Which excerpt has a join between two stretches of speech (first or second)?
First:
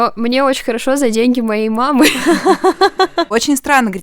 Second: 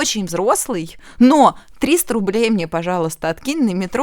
first